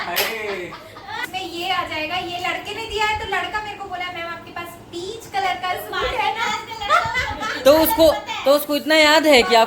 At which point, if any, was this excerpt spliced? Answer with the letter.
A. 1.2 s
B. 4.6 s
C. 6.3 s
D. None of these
A